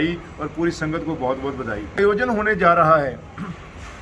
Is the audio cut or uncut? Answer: cut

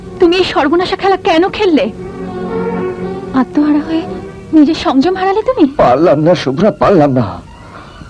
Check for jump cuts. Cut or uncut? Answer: uncut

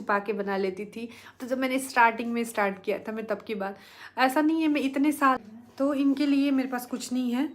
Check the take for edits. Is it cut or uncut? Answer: cut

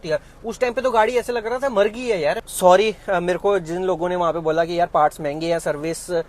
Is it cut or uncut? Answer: cut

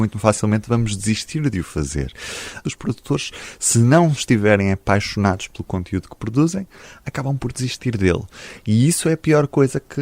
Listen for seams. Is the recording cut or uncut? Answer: cut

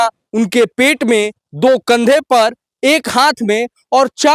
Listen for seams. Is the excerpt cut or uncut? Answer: uncut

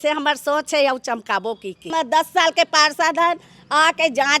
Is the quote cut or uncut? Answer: cut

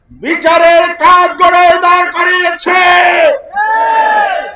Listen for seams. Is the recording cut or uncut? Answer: uncut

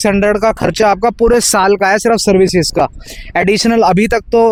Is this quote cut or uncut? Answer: uncut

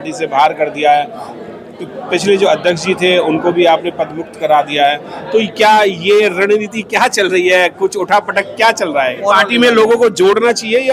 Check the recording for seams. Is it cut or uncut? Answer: cut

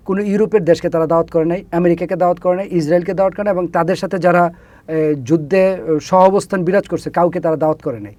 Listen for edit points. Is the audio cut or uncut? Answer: uncut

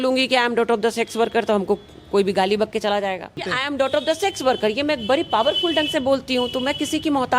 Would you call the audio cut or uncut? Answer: cut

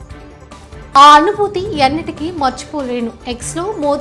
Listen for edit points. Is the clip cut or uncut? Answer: cut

